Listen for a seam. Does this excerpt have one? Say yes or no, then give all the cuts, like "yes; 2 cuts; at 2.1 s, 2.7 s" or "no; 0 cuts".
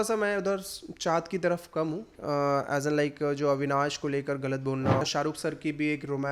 yes; 2 cuts; at 2.2 s, 5.0 s